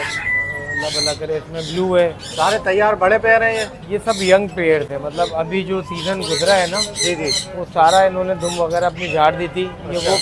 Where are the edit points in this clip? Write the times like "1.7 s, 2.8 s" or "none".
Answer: none